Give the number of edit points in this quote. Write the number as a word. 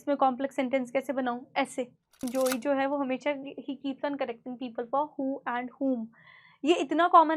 one